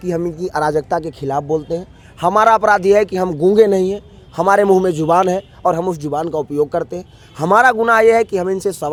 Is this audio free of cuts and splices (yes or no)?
yes